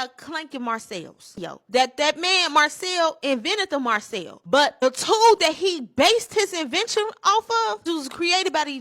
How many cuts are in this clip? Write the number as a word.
one